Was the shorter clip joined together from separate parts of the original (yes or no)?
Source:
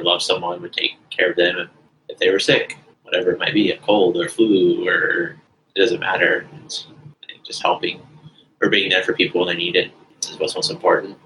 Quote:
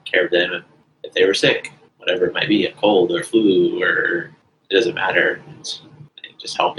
no